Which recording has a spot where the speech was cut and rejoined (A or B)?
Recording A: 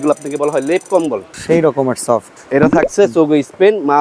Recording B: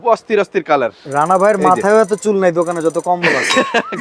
A